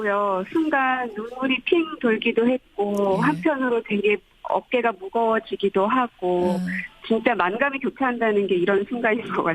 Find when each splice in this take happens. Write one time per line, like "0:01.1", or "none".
0:04.2